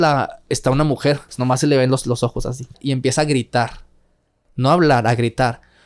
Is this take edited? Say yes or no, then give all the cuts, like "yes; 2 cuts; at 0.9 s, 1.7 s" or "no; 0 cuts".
yes; 2 cuts; at 1.3 s, 2.8 s